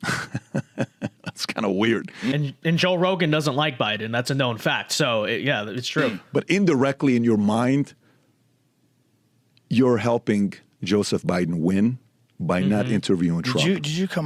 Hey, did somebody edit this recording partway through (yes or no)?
no